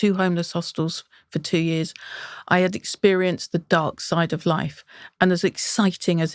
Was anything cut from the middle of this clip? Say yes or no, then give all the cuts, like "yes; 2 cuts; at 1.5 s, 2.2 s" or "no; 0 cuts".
no; 0 cuts